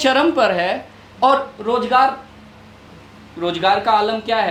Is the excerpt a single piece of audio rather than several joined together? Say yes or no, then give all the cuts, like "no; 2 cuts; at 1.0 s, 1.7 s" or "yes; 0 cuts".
yes; 0 cuts